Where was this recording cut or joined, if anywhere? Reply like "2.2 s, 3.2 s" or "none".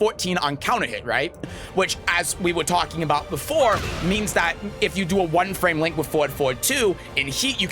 1.6 s